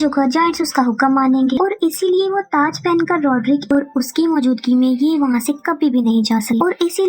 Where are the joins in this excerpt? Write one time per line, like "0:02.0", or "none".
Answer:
0:03.7